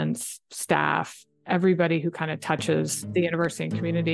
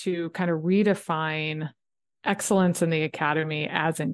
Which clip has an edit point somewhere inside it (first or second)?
first